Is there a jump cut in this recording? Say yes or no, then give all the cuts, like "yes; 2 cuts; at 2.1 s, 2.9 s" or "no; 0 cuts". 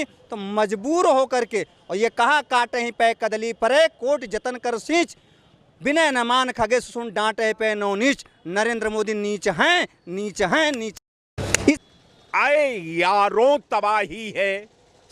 yes; 1 cut; at 11.6 s